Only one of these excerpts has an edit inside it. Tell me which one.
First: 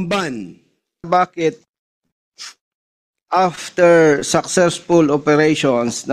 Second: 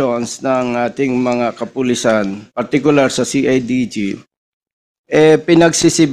first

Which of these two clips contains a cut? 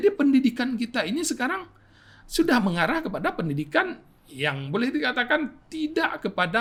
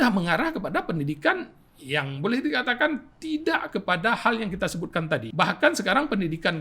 second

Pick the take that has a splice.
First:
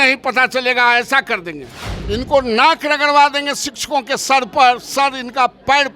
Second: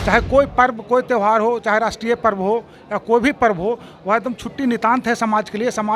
first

